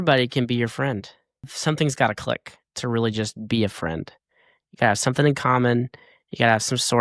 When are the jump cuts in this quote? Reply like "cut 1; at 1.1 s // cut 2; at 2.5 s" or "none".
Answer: none